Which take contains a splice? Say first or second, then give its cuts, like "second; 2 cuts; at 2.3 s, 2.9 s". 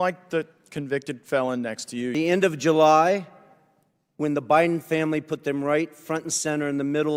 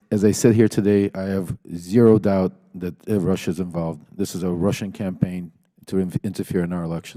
first; 1 cut; at 2.1 s